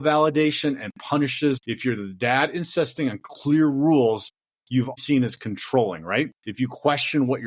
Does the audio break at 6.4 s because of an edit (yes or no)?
yes